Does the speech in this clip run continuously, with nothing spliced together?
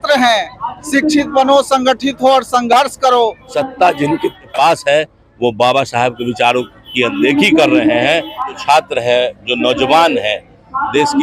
no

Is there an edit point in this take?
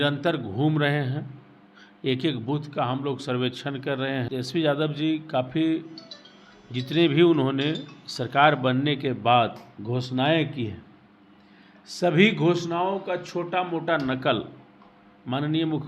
yes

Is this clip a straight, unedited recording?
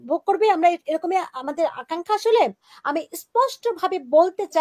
no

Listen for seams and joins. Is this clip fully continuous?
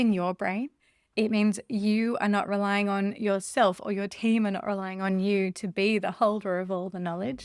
yes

